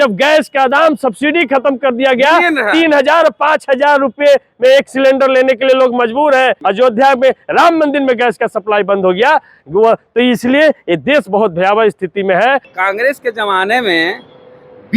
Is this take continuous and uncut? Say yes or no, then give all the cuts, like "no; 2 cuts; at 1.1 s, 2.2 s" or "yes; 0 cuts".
no; 2 cuts; at 6.6 s, 12.7 s